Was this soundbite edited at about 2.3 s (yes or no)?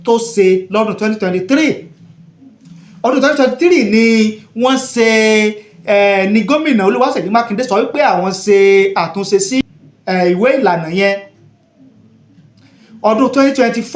no